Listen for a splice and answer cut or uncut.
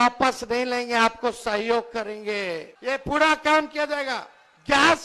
cut